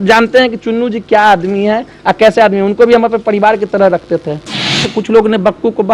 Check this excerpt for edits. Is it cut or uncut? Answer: cut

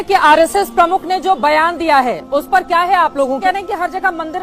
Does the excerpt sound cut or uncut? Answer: cut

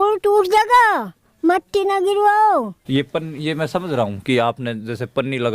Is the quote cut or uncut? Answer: cut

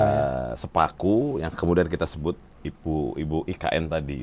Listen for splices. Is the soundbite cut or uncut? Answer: uncut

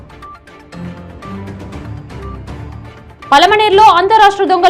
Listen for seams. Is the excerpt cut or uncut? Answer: cut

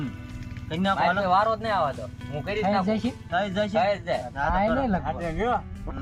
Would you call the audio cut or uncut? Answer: uncut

